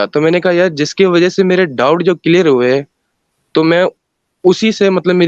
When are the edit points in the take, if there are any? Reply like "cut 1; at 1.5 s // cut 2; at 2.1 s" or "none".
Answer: none